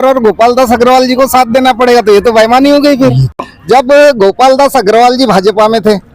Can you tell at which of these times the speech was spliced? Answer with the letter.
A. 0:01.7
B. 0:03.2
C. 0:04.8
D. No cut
B